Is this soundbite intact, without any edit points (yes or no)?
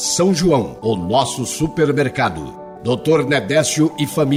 yes